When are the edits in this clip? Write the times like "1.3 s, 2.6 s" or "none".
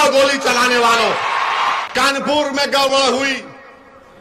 1.8 s

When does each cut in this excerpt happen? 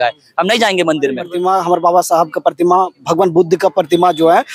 1.3 s

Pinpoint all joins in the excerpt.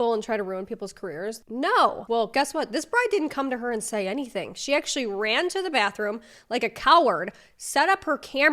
1.4 s, 2.0 s

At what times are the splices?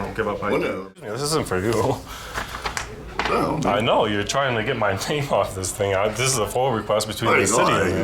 1.0 s

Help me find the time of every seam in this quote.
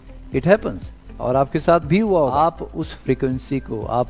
2.4 s

